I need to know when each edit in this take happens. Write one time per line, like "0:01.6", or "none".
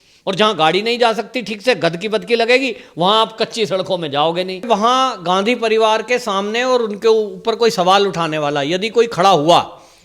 0:04.7